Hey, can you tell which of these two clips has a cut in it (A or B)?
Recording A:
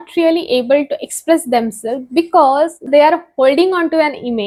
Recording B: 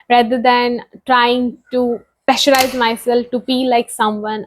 B